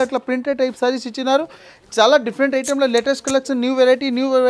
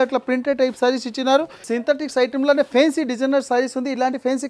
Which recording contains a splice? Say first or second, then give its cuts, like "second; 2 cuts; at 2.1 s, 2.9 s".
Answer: second; 1 cut; at 1.6 s